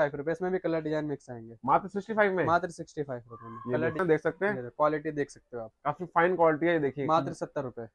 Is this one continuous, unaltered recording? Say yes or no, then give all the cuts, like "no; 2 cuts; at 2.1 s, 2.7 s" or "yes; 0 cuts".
no; 1 cut; at 4.0 s